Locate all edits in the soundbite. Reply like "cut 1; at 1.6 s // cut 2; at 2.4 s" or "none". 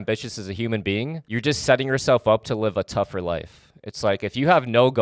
cut 1; at 1.2 s